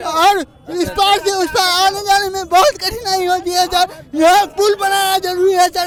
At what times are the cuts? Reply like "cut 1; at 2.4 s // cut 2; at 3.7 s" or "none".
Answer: none